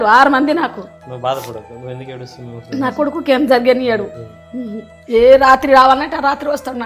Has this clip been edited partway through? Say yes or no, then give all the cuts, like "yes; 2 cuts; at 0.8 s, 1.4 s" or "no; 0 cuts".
no; 0 cuts